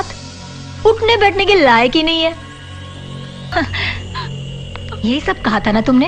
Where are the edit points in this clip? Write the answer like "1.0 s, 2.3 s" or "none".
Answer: 3.5 s